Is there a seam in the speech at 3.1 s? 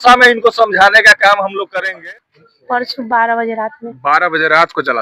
no; 1 cut; at 1.8 s

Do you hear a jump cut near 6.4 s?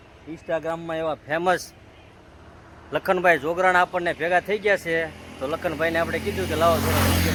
no; 0 cuts

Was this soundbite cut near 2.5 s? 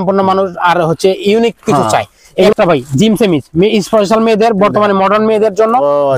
yes; 1 cut; at 2.5 s

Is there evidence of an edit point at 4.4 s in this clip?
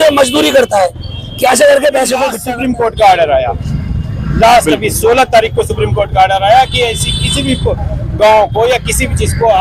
no; 1 cut; at 2.4 s

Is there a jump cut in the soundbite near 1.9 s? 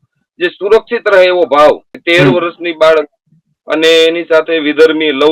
yes; 1 cut; at 1.9 s

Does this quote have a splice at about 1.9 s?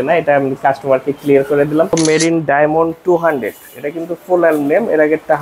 yes; 1 cut; at 1.9 s

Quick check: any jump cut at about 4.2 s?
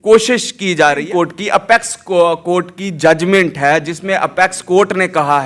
no; 1 cut; at 1.1 s

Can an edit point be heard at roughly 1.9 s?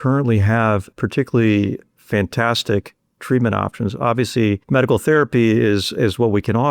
yes; 3 cuts; at 0.9 s, 1.9 s, 4.6 s

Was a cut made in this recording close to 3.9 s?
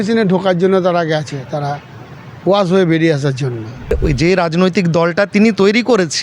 yes; 1 cut; at 3.9 s

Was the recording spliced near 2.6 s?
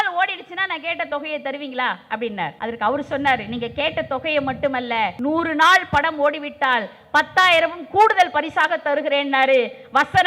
yes; 2 cuts; at 2.6 s, 5.1 s

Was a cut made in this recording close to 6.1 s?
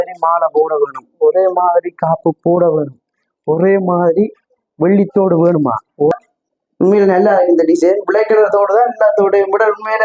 yes; 1 cut; at 6.1 s

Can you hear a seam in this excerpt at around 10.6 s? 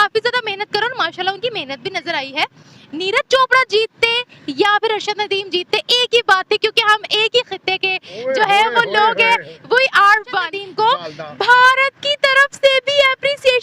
yes; 1 cut; at 10.6 s

